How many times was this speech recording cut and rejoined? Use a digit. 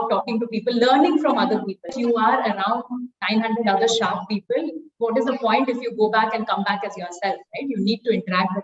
1